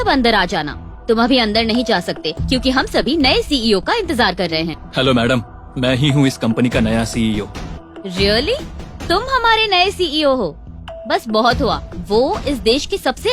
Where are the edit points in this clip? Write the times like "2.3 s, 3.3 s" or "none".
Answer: 4.8 s, 7.7 s